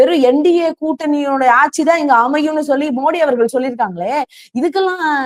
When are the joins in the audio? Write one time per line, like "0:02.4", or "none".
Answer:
none

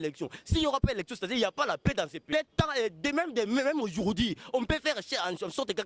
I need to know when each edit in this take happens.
0:02.3

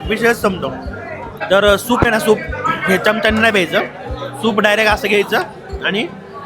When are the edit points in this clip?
0:01.4

